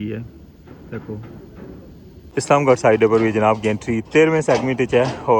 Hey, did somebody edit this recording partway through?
yes; 1 cut; at 2.2 s

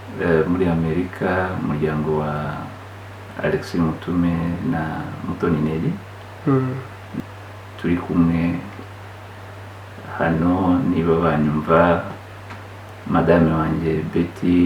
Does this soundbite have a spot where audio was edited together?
yes; 1 cut; at 7.1 s

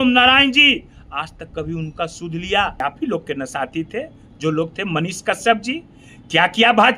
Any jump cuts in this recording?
yes; 1 cut; at 2.8 s

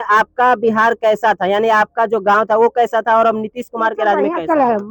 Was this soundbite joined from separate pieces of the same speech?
no; 0 cuts

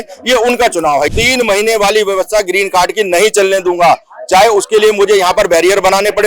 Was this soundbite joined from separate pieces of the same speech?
yes; 1 cut; at 1.1 s

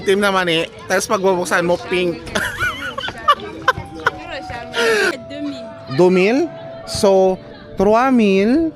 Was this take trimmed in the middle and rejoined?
yes; 1 cut; at 5.2 s

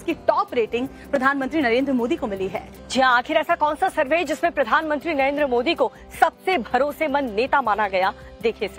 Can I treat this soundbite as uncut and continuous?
yes; 0 cuts

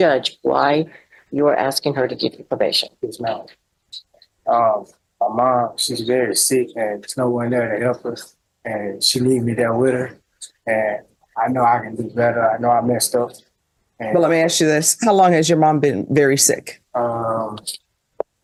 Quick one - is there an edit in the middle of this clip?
no; 0 cuts

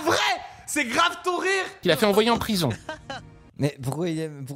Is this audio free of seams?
yes; 0 cuts

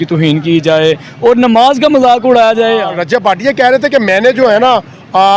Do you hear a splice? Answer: yes; 1 cut; at 2.9 s

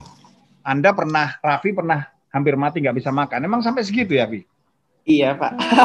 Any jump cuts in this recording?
no; 0 cuts

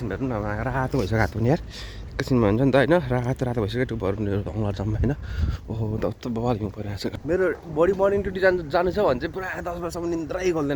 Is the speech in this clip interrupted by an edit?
yes; 1 cut; at 7.1 s

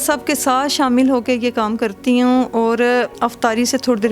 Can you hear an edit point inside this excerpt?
yes; 1 cut; at 3.1 s

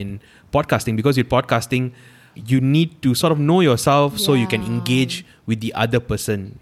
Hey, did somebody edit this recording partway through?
yes; 1 cut; at 2.3 s

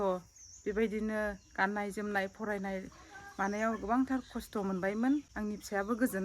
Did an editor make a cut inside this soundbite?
yes; 1 cut; at 5.3 s

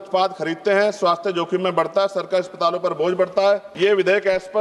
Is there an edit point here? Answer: yes; 1 cut; at 3.7 s

